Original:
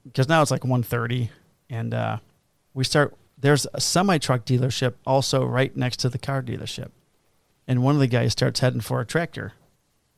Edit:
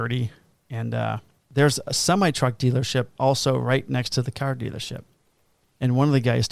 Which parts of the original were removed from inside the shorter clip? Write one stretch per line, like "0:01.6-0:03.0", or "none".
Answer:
0:02.4-0:03.2